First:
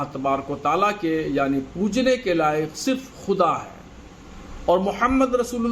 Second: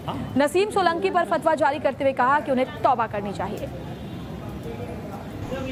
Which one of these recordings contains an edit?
first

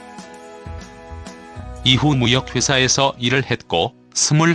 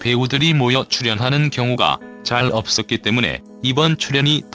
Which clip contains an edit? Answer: first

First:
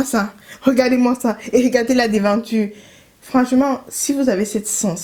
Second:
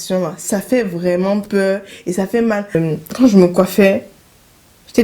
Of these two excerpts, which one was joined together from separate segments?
second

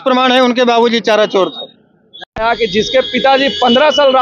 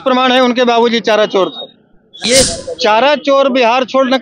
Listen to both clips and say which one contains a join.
second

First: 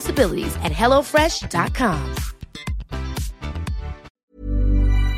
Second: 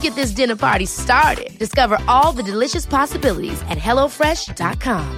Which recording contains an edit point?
first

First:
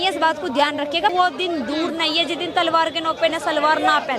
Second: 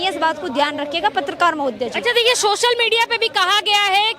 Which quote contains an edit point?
first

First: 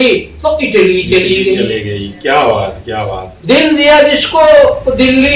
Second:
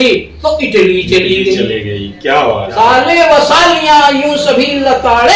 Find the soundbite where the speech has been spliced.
second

